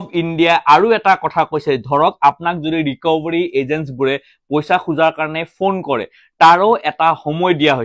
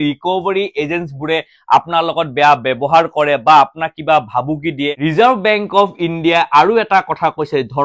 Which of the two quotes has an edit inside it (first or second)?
second